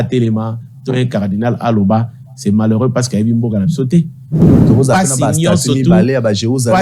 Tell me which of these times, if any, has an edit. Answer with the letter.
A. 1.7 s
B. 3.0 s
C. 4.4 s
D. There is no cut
C